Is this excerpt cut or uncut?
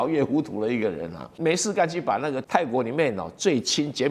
cut